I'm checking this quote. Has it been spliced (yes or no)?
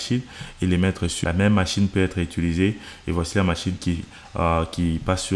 yes